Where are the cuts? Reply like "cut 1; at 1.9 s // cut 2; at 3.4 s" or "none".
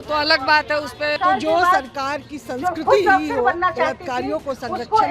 cut 1; at 1.2 s